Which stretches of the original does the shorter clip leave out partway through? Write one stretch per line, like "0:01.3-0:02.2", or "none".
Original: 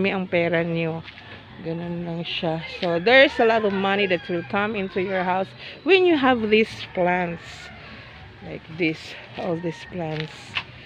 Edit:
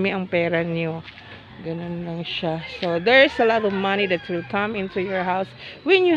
none